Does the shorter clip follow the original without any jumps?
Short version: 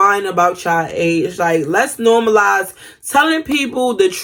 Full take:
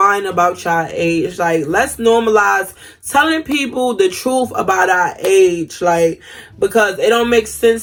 yes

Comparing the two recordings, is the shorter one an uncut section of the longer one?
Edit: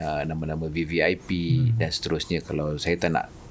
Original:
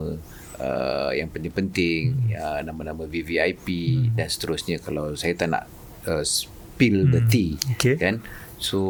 yes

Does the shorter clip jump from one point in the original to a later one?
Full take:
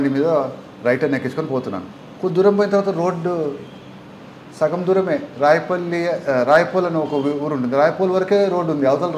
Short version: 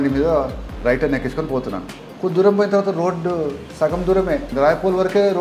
yes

